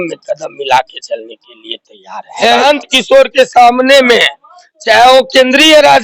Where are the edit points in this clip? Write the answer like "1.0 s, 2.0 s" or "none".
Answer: 2.6 s